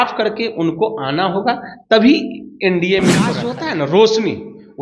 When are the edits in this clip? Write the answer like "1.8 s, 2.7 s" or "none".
3.4 s